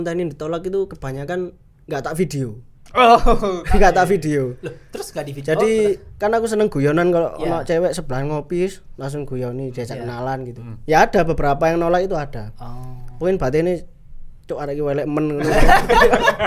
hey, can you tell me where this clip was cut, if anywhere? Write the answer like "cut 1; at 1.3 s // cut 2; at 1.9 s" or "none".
none

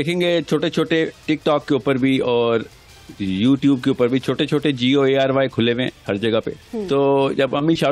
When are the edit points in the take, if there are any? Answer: cut 1; at 6.7 s

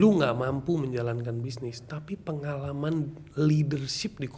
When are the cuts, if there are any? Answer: none

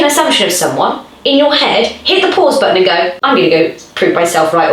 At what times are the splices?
cut 1; at 3.2 s

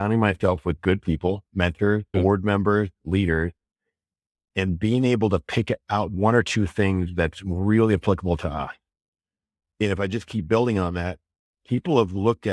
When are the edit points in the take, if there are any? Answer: cut 1; at 2.1 s // cut 2; at 6.1 s

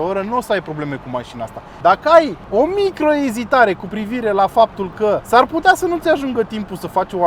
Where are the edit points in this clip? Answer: cut 1; at 1.6 s // cut 2; at 2.4 s // cut 3; at 5.2 s

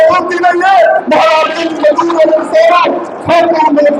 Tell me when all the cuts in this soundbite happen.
none

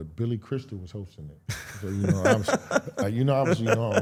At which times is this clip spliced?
none

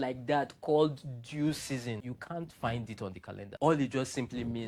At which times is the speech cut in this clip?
cut 1; at 2.0 s

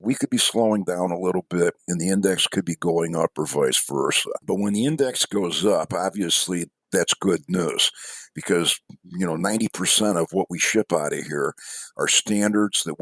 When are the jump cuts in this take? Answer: cut 1; at 1.8 s

